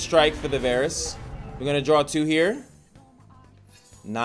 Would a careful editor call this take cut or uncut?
uncut